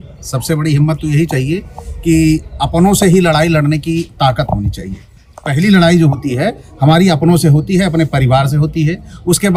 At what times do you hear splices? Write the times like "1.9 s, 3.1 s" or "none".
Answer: none